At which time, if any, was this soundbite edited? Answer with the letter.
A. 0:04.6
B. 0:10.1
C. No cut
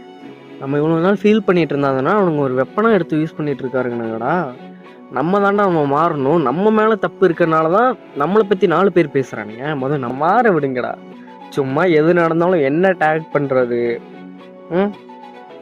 B